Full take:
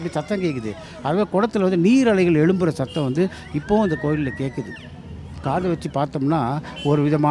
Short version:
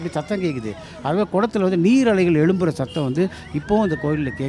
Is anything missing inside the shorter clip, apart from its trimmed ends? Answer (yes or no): no